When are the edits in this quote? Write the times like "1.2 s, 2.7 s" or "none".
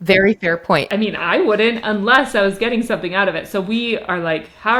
none